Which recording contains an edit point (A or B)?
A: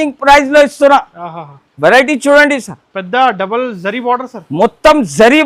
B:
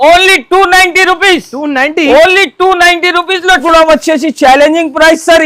B